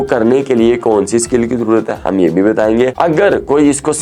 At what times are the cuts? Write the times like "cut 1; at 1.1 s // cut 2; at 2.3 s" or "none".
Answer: cut 1; at 2.9 s